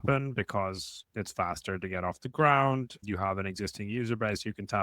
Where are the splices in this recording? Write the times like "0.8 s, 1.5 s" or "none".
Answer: 1.1 s, 3.0 s